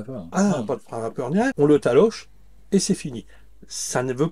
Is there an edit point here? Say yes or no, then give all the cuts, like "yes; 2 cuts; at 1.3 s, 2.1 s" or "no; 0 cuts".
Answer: yes; 1 cut; at 1.5 s